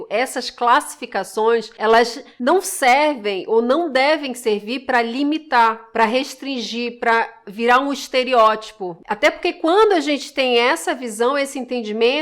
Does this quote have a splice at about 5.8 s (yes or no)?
yes